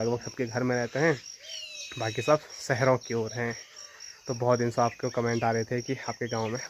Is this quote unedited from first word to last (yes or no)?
yes